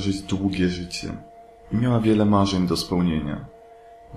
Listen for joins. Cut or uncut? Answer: uncut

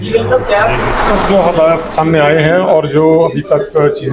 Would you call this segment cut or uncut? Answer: cut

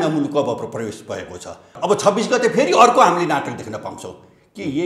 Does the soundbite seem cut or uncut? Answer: cut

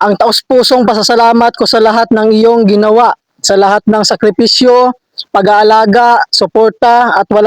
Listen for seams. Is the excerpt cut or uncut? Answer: uncut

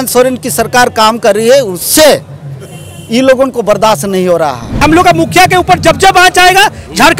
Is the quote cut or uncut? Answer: cut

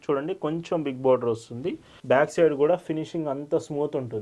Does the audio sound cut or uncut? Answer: cut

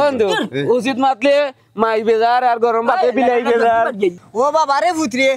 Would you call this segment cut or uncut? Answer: cut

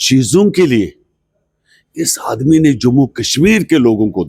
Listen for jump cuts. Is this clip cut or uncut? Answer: uncut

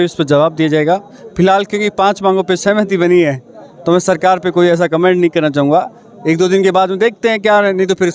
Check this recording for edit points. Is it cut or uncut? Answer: uncut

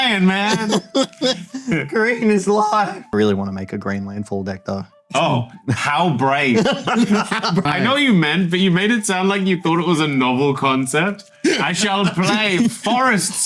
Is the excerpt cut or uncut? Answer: cut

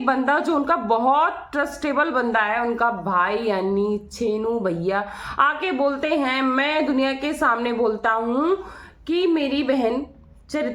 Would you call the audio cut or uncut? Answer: uncut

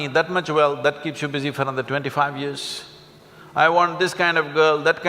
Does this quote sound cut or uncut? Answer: uncut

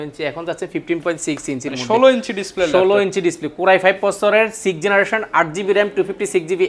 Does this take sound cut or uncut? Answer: uncut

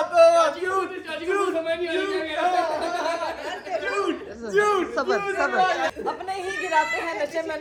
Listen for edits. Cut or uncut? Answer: uncut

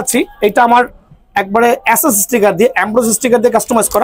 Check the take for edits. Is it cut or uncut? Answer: uncut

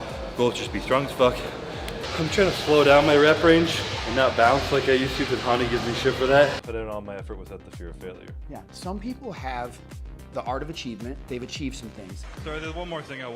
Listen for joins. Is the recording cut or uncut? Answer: uncut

